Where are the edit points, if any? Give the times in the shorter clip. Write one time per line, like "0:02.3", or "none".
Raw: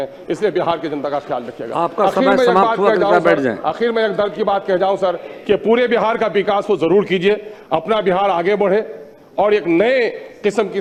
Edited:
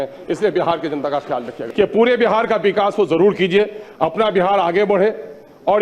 0:01.6